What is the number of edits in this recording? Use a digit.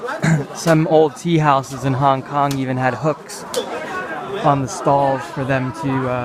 0